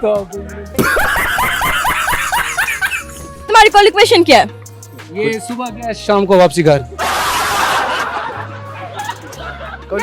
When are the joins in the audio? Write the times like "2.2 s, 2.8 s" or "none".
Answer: 3.5 s